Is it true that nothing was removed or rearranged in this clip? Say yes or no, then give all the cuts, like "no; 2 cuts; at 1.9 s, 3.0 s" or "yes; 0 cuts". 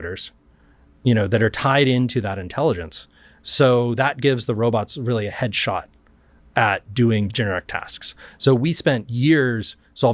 no; 1 cut; at 7.3 s